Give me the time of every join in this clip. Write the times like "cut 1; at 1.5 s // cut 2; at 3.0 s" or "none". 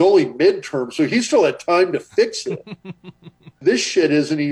cut 1; at 3.5 s